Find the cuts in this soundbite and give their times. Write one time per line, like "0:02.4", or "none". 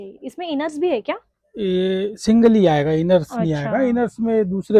none